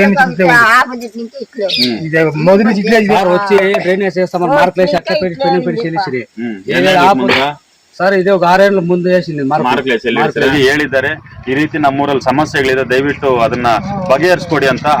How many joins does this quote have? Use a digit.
1